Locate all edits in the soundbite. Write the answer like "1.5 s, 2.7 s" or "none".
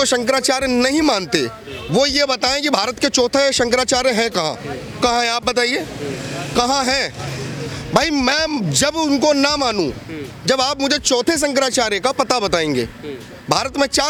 none